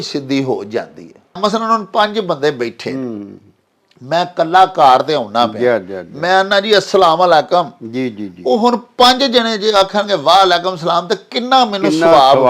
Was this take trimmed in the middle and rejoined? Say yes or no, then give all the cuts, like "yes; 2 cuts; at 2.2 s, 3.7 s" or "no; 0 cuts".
yes; 1 cut; at 1.4 s